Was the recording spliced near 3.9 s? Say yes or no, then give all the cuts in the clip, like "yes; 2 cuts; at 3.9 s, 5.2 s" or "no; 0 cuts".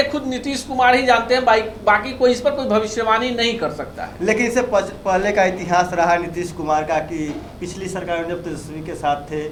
no; 0 cuts